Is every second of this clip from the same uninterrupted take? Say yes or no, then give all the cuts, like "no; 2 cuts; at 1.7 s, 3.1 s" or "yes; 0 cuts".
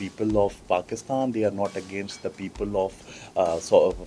yes; 0 cuts